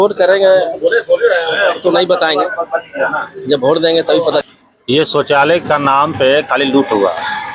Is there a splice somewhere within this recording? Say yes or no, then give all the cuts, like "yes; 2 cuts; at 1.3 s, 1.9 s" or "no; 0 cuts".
yes; 1 cut; at 4.4 s